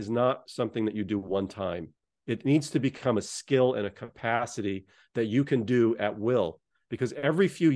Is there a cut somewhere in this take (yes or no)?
no